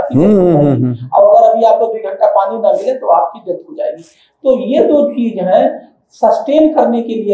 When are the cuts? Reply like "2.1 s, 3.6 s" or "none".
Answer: none